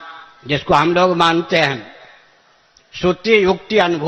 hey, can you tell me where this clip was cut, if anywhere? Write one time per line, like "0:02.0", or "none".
none